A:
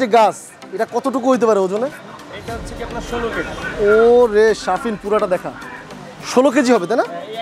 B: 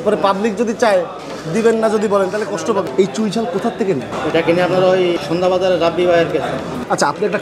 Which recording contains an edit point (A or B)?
B